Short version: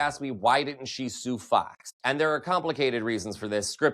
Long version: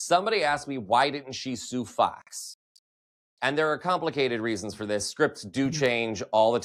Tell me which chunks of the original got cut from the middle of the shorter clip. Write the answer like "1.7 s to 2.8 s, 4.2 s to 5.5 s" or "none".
2.3 s to 3.2 s

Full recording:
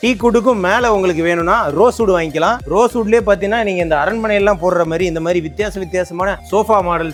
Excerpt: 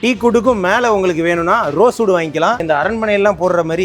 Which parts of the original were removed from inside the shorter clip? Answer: 2.6 s to 3.8 s

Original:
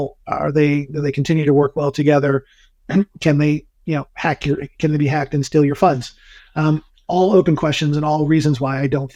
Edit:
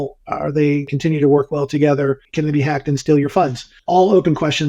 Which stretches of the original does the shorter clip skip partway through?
0.9 s to 1.2 s, 2.5 s to 4.7 s, 6.2 s to 6.9 s

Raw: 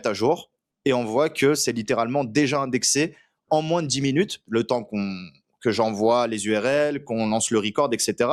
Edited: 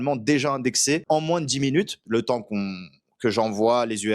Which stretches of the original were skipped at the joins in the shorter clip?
3.1 s to 3.4 s

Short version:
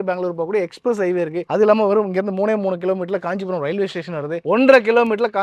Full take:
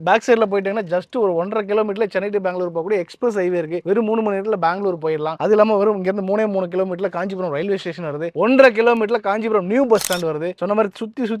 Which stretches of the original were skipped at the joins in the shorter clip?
3.8 s to 5.4 s

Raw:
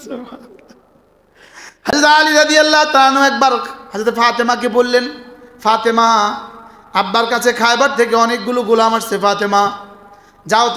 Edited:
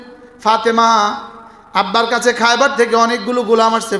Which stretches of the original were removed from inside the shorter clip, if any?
none

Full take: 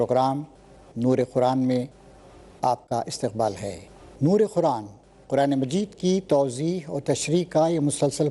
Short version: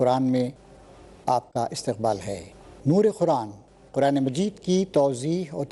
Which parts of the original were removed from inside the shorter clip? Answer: none

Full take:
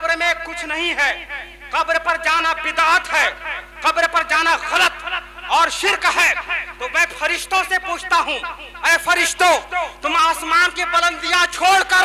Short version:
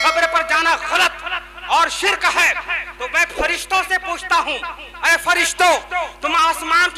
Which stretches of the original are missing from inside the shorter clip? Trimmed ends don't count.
none

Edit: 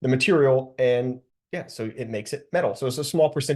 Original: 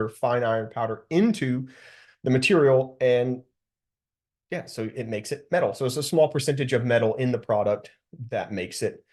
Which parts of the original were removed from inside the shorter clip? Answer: 3.6 s to 4.3 s

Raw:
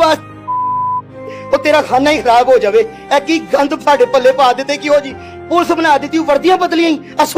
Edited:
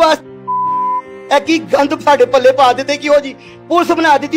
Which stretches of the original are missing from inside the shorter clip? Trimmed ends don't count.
1.2 s to 3.0 s

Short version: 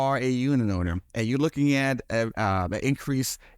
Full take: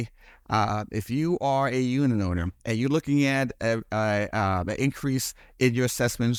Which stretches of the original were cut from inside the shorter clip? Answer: 3.8 s to 4.3 s

